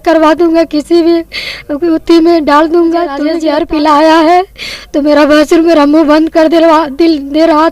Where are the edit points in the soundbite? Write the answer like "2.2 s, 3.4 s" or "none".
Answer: 3.3 s